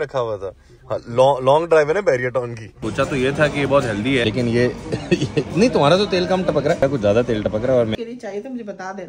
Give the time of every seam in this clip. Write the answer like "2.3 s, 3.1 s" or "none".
2.8 s, 4.2 s, 6.8 s, 7.9 s